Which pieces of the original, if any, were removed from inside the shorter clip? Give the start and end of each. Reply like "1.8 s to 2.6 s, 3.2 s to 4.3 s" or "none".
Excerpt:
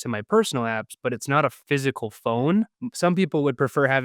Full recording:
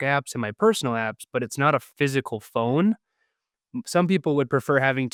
3.1 s to 3.7 s